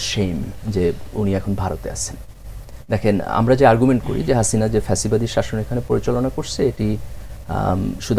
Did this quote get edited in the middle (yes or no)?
no